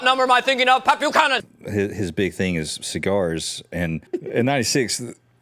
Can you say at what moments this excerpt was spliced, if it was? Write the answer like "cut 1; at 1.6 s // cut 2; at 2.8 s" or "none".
cut 1; at 1.5 s // cut 2; at 4.1 s